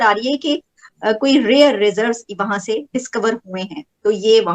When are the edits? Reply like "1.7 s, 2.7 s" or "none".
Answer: none